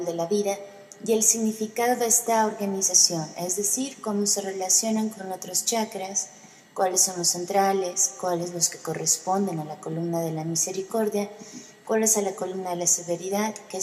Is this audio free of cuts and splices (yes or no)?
no